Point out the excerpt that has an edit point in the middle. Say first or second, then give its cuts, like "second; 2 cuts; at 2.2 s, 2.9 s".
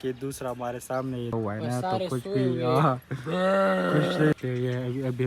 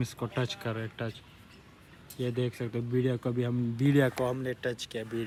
first; 2 cuts; at 1.3 s, 4.3 s